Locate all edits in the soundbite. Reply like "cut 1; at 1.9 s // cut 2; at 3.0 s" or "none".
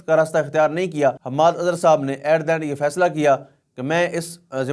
cut 1; at 1.2 s